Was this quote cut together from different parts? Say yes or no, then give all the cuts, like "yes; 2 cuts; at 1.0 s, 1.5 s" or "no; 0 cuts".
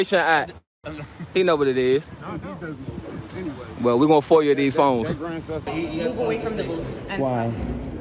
yes; 1 cut; at 5.6 s